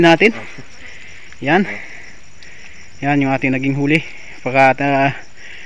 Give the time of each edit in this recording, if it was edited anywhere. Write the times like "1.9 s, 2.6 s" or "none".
none